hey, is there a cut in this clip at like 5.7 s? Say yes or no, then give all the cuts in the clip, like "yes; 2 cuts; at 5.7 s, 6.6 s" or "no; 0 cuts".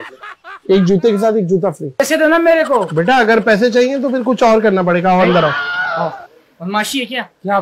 no; 1 cut; at 1.9 s